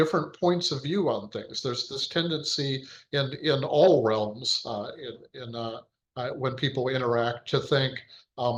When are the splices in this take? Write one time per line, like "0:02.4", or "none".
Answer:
none